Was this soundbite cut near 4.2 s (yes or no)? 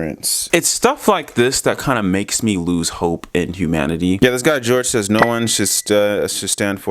yes